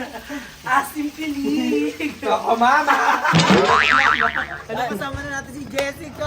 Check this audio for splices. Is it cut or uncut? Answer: cut